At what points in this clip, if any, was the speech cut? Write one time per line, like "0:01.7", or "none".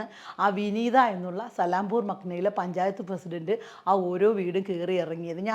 none